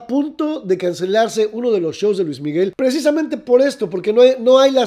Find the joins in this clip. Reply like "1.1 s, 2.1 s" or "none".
none